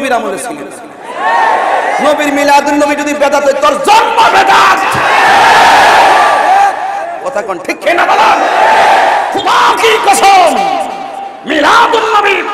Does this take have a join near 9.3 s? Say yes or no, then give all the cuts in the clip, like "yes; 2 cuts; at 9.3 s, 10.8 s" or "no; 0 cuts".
yes; 1 cut; at 9.3 s